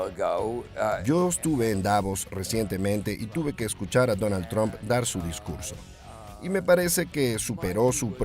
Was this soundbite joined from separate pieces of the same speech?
yes; 1 cut; at 1.0 s

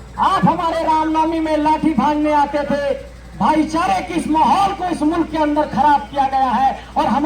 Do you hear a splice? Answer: no; 0 cuts

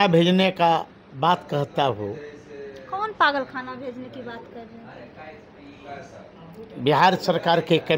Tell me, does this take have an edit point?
no; 0 cuts

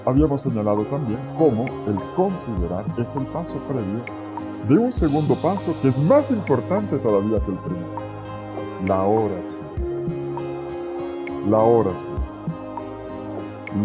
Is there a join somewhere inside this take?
yes; 1 cut; at 3.6 s

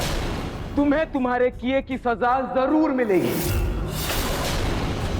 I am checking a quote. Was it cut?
no; 0 cuts

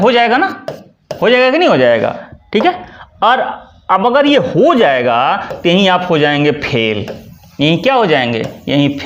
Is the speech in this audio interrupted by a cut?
no; 0 cuts

